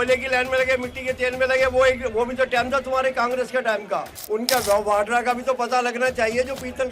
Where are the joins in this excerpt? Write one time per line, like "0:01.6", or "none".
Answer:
0:04.1